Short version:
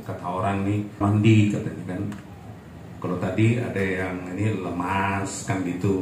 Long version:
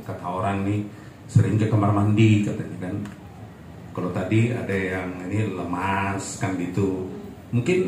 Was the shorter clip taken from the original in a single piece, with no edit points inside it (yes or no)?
no